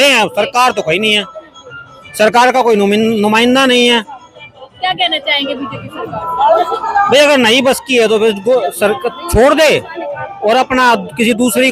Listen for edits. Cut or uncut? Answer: uncut